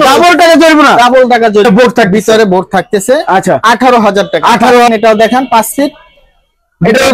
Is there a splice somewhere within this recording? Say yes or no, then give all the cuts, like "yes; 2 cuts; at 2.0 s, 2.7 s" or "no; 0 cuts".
yes; 2 cuts; at 1.6 s, 4.9 s